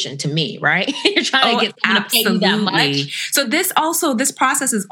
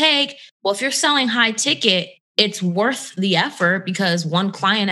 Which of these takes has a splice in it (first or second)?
second